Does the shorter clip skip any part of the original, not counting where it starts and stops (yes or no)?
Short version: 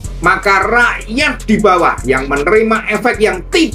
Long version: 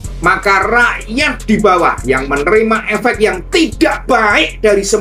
no